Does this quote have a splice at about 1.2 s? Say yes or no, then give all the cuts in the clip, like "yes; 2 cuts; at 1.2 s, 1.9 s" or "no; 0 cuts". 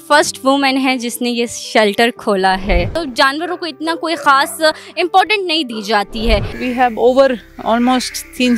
no; 2 cuts; at 2.9 s, 6.5 s